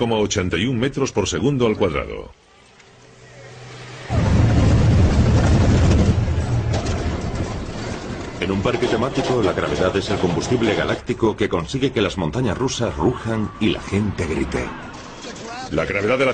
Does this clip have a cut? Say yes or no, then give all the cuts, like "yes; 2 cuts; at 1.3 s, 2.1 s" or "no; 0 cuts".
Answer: no; 0 cuts